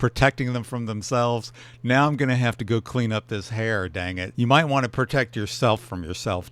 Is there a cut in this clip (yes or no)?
yes